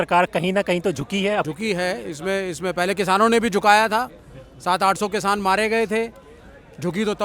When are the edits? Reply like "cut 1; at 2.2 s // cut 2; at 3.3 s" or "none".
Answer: cut 1; at 1.5 s